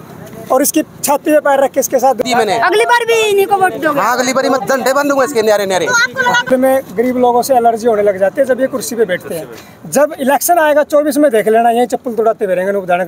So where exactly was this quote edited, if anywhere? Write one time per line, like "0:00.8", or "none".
0:02.2
0:06.4